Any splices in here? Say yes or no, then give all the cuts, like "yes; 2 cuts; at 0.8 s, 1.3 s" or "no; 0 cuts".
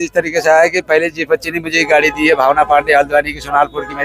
no; 0 cuts